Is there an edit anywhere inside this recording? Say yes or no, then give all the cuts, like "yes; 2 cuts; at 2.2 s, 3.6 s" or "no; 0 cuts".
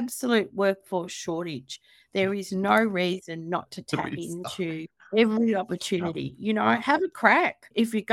no; 0 cuts